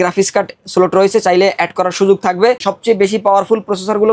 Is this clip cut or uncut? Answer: cut